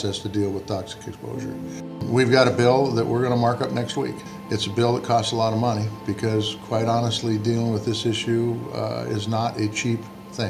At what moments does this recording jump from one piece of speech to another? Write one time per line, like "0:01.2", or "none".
0:02.0
0:04.3